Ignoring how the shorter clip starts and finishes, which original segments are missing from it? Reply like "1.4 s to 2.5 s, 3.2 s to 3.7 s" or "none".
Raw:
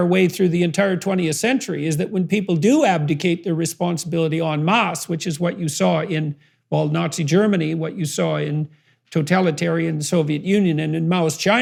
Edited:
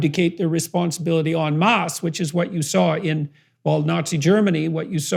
none